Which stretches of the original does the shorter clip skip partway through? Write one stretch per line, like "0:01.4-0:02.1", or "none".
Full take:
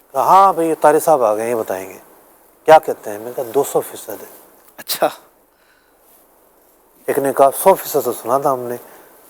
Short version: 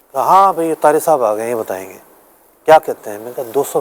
none